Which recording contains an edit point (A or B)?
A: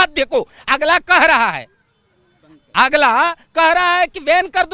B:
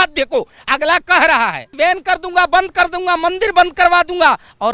B